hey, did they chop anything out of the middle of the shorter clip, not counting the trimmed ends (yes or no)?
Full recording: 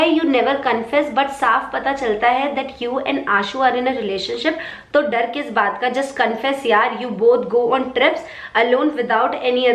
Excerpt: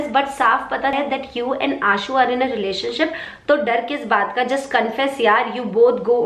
yes